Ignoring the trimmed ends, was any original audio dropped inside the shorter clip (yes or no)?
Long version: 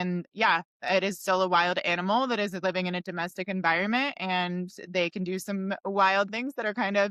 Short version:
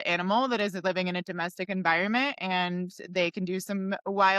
no